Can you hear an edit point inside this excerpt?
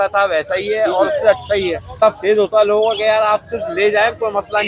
yes; 1 cut; at 2.0 s

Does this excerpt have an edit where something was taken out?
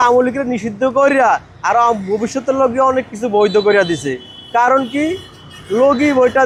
no; 0 cuts

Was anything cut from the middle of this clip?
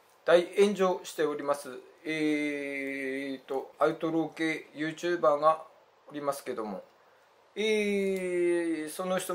yes; 1 cut; at 3.7 s

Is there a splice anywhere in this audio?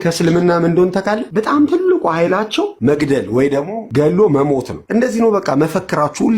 yes; 4 cuts; at 1.2 s, 2.7 s, 3.9 s, 4.8 s

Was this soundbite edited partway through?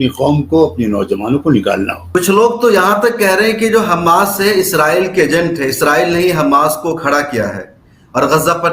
yes; 1 cut; at 2.0 s

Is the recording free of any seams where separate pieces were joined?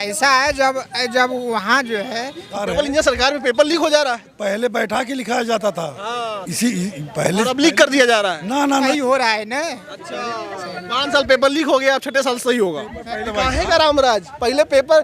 no; 3 cuts; at 2.6 s, 8.9 s, 13.3 s

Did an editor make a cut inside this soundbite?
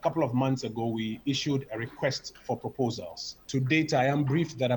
no; 0 cuts

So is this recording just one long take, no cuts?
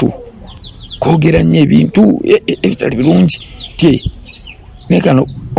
yes; 0 cuts

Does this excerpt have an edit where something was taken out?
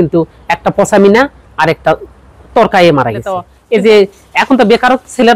yes; 1 cut; at 3.6 s

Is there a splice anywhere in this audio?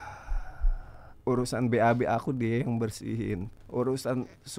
yes; 2 cuts; at 1.1 s, 3.5 s

